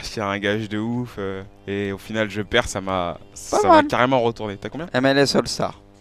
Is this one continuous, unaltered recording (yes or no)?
no